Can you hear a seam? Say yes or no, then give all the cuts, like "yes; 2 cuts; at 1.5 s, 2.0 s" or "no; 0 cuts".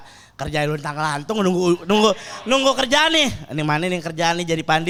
no; 0 cuts